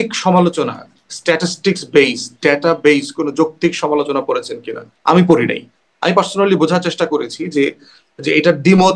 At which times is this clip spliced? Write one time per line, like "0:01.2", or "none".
none